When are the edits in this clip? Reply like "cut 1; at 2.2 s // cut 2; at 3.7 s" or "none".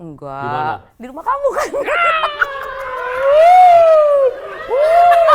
cut 1; at 0.9 s

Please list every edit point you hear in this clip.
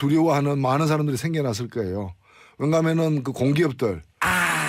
none

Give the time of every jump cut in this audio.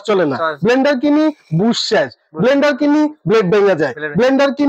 none

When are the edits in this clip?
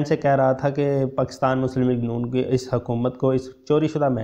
none

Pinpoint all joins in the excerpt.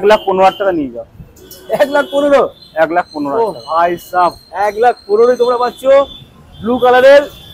none

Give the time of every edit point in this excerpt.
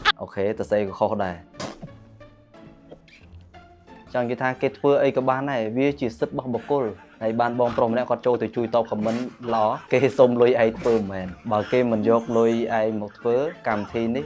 none

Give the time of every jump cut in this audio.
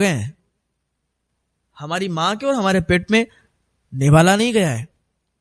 none

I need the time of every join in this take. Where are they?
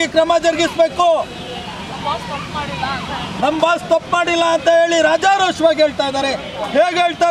none

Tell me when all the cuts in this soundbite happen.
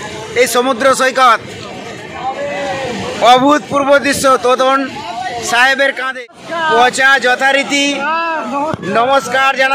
cut 1; at 6.1 s

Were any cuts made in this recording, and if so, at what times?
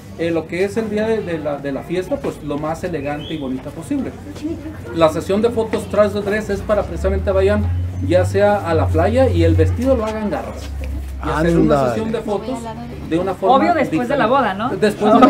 none

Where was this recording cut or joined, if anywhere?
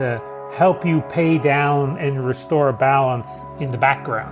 cut 1; at 3.4 s

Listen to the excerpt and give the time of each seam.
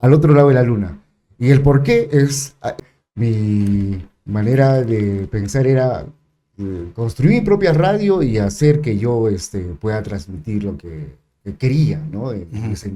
cut 1; at 2.8 s

